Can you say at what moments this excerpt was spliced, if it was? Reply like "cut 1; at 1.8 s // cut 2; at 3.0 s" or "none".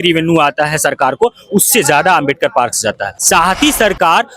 cut 1; at 3.1 s